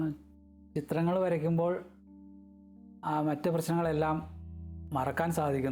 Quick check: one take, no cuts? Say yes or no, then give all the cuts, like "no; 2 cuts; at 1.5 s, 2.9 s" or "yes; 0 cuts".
yes; 0 cuts